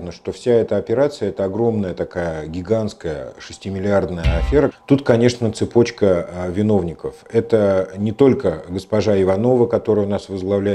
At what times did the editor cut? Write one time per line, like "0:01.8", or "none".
0:04.7